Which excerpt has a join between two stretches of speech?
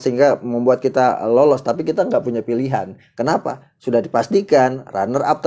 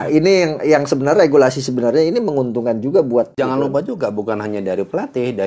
second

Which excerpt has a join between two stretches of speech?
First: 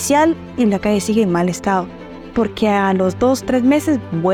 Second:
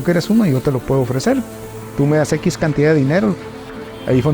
second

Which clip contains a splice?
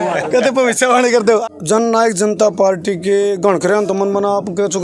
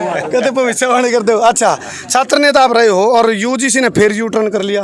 first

